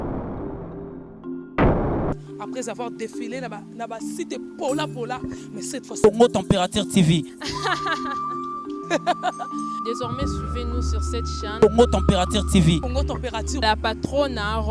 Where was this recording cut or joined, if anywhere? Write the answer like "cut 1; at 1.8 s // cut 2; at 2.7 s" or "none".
none